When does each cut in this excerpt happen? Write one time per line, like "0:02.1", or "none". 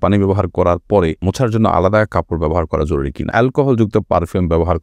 0:01.2
0:03.3